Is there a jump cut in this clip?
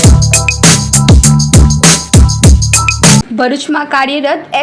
yes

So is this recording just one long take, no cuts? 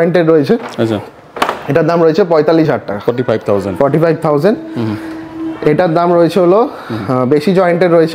yes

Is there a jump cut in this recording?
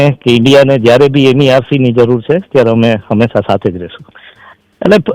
yes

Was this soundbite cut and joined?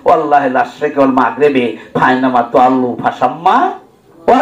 no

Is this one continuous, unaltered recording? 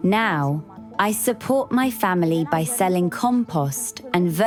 yes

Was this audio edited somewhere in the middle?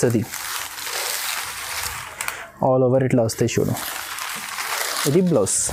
no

